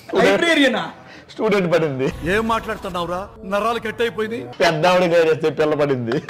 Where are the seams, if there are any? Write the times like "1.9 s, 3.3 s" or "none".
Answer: 2.2 s